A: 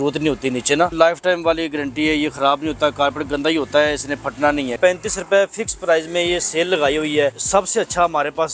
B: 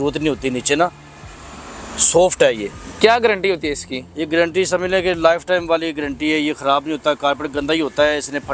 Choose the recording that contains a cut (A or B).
A